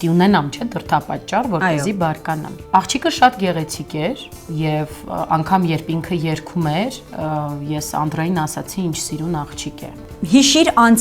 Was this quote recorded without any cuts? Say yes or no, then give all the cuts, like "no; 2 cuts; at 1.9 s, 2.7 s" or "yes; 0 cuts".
no; 2 cuts; at 2.5 s, 10.0 s